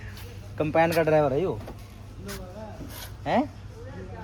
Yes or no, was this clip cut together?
no